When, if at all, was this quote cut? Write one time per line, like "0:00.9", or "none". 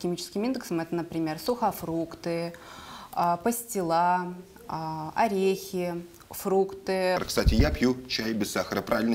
0:07.2